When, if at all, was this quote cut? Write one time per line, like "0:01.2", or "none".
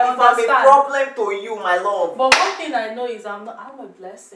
none